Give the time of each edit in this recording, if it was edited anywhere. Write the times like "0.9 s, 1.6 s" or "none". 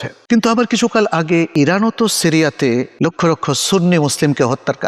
1.5 s, 2.9 s